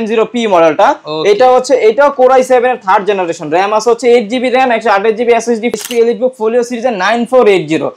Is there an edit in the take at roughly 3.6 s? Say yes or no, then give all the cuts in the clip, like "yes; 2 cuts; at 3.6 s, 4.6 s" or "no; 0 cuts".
no; 1 cut; at 5.8 s